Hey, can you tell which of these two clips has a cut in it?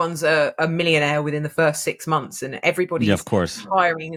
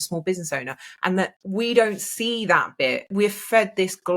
second; 2 cuts; at 1.4 s, 3.1 s

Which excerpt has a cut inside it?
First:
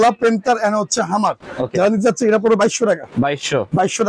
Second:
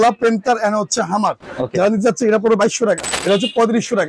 second; 1 cut; at 3.1 s

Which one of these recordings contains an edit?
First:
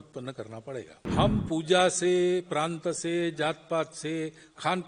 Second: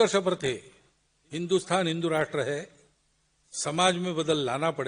first; 1 cut; at 1.0 s

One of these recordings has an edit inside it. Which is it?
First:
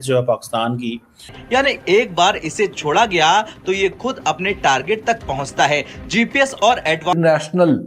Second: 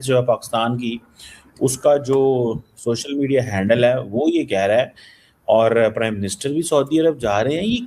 first; 2 cuts; at 1.3 s, 7.1 s

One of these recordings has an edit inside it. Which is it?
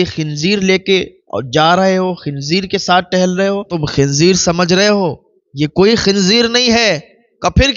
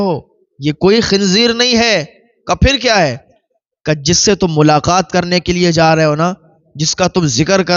first; 1 cut; at 3.8 s

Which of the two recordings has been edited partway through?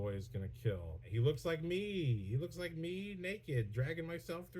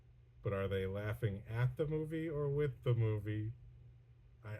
first; 1 cut; at 1.1 s

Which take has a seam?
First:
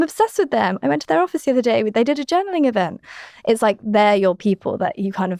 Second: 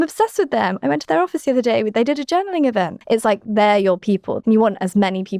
second; 2 cuts; at 3.0 s, 4.4 s

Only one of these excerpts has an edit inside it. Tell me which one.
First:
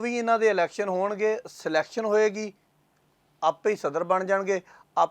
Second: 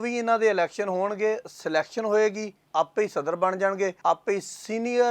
second; 2 cuts; at 2.5 s, 4.0 s

